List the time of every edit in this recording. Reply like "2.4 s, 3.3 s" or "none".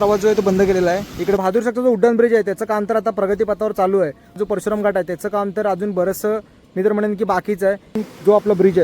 1.4 s, 4.4 s, 8.0 s